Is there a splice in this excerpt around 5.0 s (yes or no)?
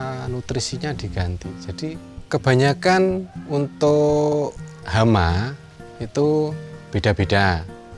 no